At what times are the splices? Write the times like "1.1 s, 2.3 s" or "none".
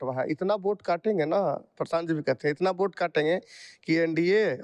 none